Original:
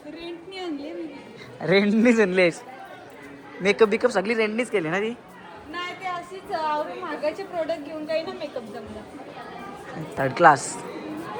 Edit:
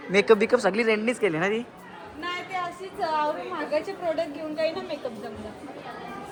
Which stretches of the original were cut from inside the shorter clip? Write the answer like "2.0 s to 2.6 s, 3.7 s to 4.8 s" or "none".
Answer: none